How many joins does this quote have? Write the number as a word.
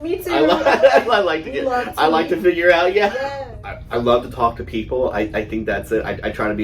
one